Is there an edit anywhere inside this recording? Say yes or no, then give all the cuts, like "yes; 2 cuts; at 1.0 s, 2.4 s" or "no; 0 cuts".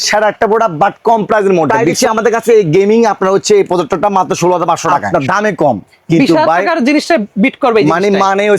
yes; 2 cuts; at 1.8 s, 5.0 s